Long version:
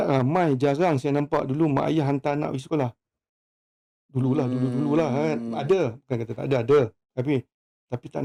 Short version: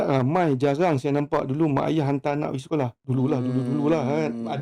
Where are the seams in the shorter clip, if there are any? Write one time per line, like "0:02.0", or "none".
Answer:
0:03.0